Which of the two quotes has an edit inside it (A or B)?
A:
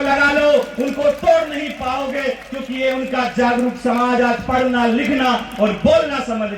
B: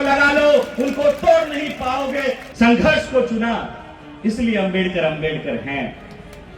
B